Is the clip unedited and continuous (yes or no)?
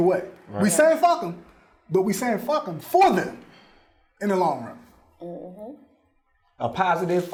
yes